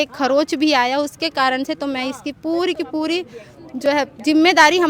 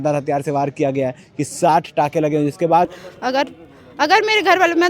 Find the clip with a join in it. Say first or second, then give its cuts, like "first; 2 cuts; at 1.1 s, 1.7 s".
second; 1 cut; at 3.0 s